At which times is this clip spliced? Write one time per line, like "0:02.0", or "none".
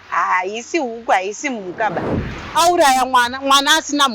0:02.3